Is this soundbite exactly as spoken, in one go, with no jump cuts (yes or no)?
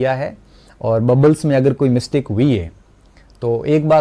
yes